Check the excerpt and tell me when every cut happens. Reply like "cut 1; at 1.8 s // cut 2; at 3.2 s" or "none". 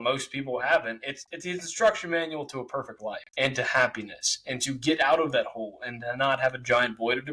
cut 1; at 3.2 s